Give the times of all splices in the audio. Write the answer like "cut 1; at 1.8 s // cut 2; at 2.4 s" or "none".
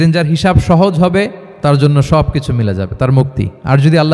cut 1; at 1.4 s